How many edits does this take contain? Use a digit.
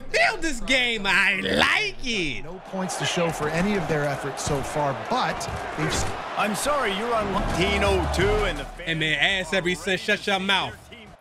1